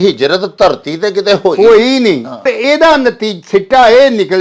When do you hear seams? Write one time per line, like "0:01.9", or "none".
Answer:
0:02.5